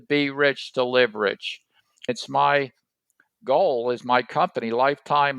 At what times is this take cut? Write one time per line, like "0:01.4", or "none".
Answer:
0:02.1